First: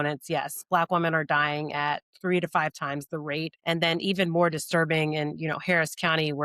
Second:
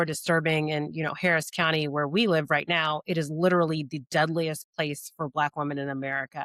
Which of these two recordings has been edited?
first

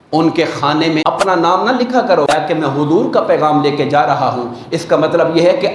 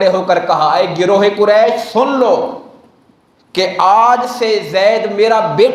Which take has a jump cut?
first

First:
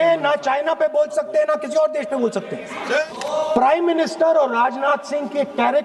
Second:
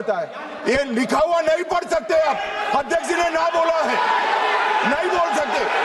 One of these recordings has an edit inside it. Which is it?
first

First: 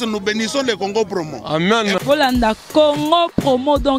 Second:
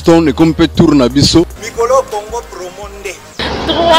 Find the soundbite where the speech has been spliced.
second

